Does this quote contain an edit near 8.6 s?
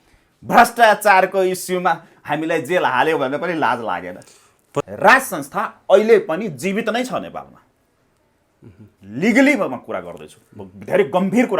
no; 1 cut; at 4.9 s

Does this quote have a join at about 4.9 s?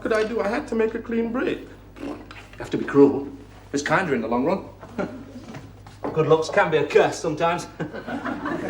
no; 1 cut; at 6.2 s

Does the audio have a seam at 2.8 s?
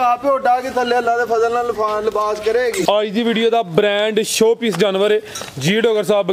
yes; 1 cut; at 2.8 s

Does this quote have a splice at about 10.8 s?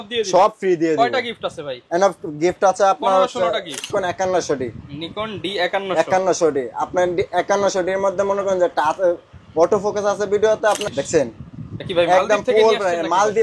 yes; 2 cuts; at 3.8 s, 10.8 s

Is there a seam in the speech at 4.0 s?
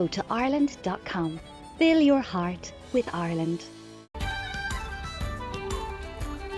yes; 1 cut; at 4.0 s

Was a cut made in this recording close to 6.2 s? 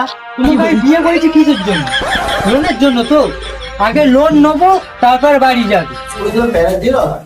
yes; 1 cut; at 6.2 s

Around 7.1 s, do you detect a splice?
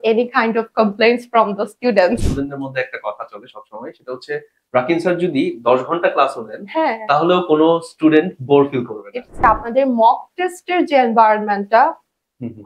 no; 2 cuts; at 2.3 s, 9.3 s

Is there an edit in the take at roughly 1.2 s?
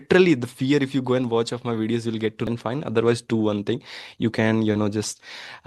no; 1 cut; at 2.5 s

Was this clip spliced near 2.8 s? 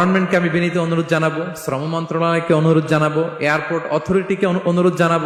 no; 0 cuts

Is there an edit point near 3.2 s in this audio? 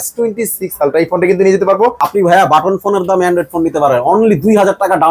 no; 1 cut; at 2.0 s

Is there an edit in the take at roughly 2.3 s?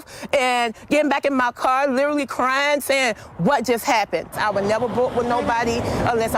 no; 1 cut; at 4.4 s

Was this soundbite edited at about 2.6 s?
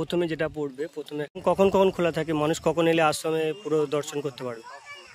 no; 1 cut; at 1.3 s

